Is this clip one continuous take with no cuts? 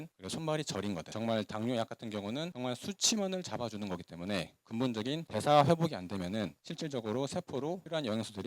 no; 2 cuts; at 1.1 s, 5.2 s

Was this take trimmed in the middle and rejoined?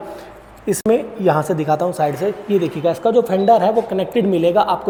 no; 0 cuts

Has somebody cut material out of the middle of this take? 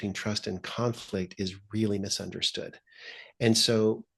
no; 0 cuts

